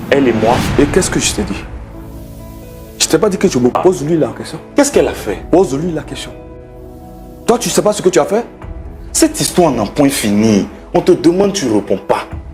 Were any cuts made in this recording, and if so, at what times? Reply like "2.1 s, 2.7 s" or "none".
1.6 s, 2.9 s